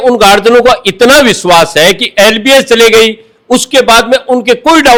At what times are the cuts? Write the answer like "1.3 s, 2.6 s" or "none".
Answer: none